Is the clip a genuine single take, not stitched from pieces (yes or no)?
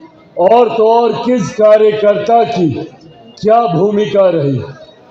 yes